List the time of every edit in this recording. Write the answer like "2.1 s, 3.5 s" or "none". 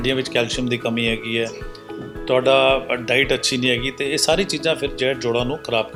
none